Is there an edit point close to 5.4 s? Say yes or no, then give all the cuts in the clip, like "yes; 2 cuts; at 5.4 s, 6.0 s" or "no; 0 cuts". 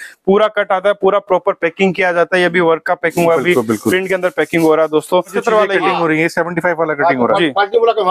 yes; 1 cut; at 5.4 s